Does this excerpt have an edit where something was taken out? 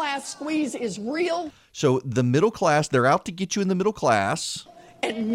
no; 0 cuts

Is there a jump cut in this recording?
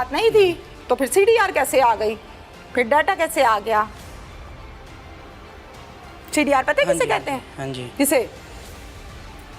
no; 0 cuts

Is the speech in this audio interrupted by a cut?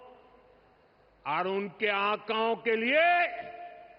no; 0 cuts

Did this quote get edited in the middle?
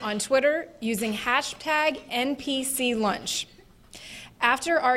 yes; 1 cut; at 2.4 s

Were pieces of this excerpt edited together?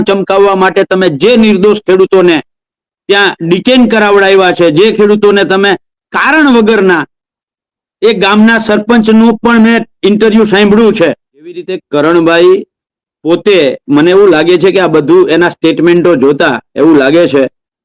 yes; 1 cut; at 11.8 s

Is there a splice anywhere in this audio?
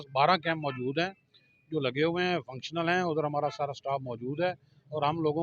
no; 0 cuts

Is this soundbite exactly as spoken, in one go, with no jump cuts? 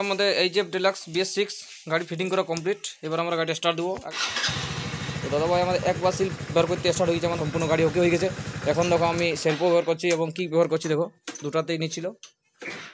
no; 3 cuts; at 4.0 s, 7.4 s, 9.7 s

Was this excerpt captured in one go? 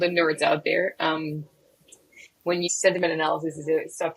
no; 1 cut; at 2.7 s

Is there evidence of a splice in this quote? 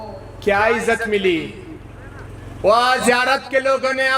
no; 0 cuts

